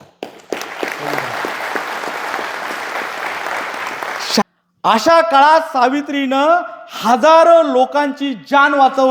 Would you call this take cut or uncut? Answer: cut